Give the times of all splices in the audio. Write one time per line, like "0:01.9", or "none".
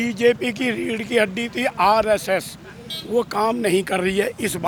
none